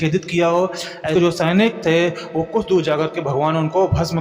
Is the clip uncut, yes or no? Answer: no